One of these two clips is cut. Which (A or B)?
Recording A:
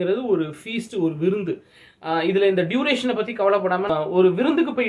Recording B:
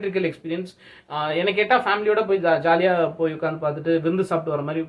A